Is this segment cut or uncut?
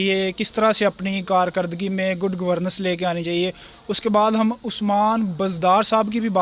uncut